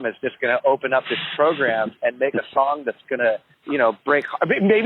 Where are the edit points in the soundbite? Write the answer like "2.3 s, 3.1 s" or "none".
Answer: 3.5 s